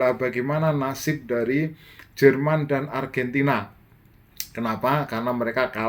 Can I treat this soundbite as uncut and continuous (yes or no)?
yes